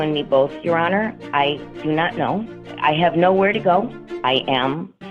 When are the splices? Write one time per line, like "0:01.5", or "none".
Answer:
0:02.6
0:04.0